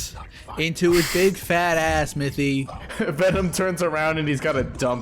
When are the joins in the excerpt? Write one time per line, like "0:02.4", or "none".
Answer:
0:02.8